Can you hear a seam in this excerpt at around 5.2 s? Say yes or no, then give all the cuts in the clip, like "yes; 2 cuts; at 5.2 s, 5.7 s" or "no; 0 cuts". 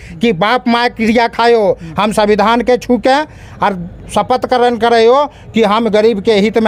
no; 0 cuts